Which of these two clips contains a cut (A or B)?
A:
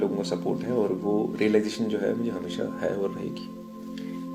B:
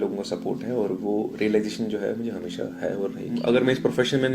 B